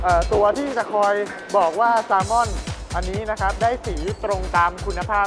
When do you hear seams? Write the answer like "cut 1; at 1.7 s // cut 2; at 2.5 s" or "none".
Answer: none